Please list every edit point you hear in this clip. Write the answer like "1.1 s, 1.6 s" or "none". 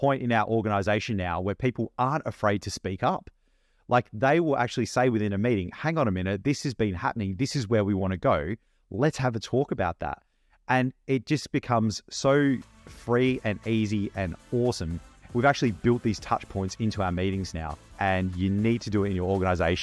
17.9 s